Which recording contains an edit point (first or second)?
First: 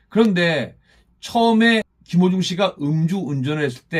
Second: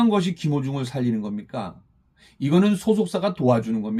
first